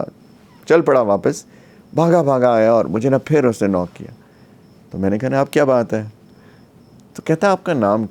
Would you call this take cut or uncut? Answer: uncut